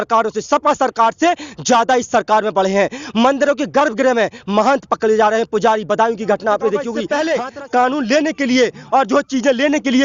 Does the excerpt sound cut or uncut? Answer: cut